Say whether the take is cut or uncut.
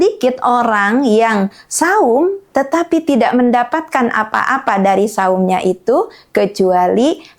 uncut